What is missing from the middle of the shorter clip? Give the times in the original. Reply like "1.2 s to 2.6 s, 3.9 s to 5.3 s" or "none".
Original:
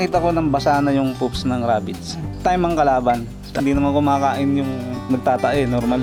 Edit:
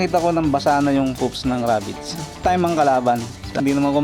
none